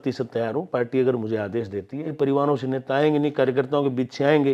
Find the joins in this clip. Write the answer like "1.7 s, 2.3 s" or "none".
2.1 s